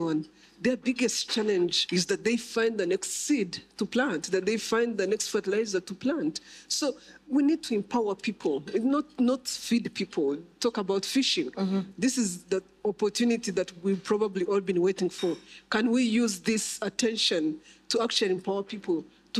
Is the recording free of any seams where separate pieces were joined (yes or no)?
no